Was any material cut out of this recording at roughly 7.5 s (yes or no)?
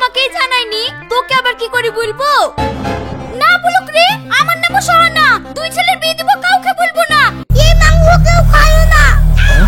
yes